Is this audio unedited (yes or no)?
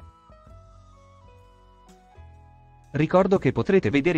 yes